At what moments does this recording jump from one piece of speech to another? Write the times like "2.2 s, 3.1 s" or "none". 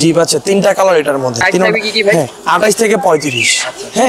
none